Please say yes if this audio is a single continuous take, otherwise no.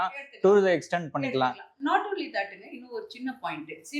yes